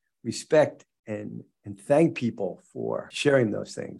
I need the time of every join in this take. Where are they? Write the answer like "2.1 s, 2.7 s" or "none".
3.1 s